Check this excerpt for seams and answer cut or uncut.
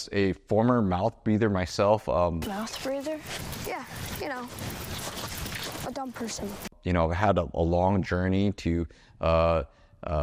uncut